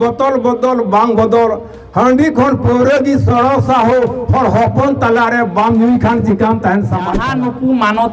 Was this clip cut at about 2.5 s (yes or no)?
no